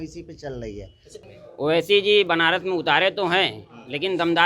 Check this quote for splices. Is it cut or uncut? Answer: cut